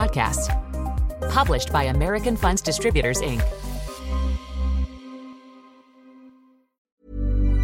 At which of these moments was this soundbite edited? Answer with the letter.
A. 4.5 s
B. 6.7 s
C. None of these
B